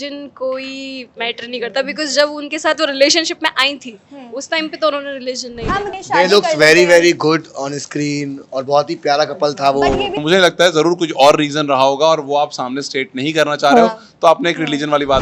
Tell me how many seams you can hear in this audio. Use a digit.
2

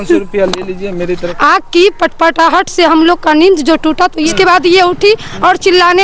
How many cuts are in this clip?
2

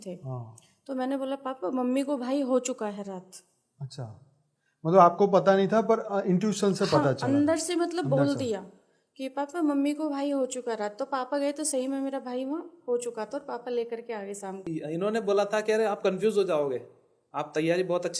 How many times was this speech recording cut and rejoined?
1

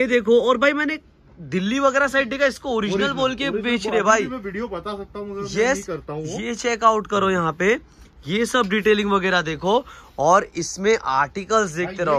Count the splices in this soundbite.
0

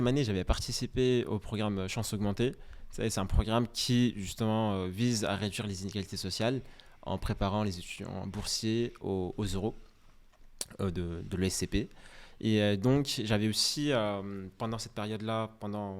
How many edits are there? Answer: 0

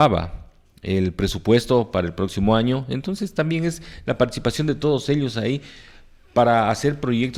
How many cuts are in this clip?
0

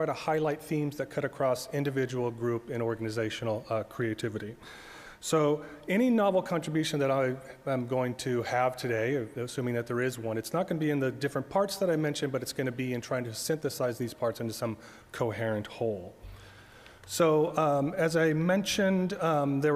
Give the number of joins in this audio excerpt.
1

